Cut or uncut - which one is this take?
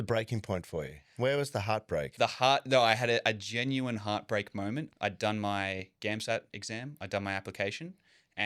cut